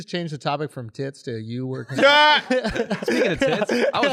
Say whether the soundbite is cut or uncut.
uncut